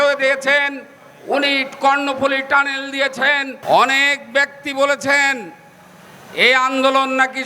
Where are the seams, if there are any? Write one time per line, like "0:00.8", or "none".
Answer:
0:03.5